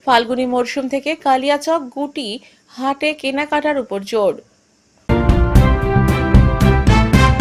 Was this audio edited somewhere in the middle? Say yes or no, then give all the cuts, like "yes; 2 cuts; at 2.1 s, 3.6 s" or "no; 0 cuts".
yes; 1 cut; at 4.9 s